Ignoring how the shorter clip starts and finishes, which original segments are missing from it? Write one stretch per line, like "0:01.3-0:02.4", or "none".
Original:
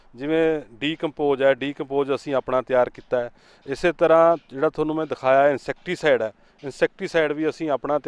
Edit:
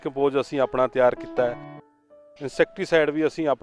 0:03.8-0:06.2